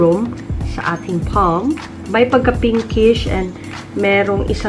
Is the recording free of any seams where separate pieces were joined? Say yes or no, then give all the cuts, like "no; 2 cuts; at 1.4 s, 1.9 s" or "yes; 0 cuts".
no; 1 cut; at 1.9 s